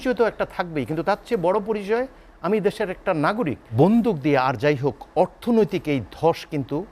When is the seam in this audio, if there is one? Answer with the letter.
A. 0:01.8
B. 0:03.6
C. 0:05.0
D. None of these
B